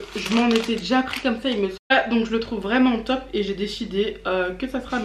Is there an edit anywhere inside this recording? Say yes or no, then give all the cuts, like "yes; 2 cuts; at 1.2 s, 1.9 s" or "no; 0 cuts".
yes; 1 cut; at 1.8 s